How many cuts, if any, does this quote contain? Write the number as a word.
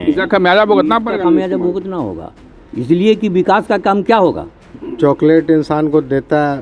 one